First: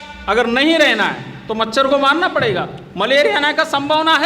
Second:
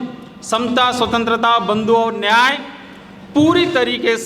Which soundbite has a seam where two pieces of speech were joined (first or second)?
first